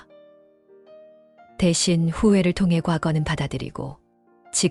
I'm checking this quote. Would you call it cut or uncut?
uncut